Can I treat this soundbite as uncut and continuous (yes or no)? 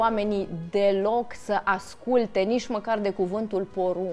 yes